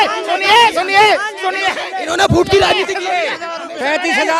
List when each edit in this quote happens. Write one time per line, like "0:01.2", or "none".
none

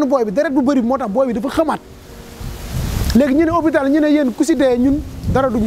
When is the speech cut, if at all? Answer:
none

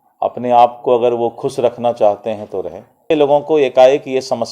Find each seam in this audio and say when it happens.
0:03.1

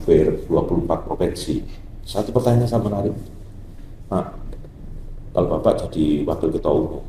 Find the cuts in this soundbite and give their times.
none

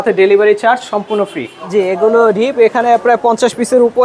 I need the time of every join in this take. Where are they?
0:01.5

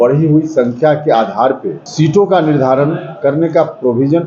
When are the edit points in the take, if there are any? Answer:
0:01.8

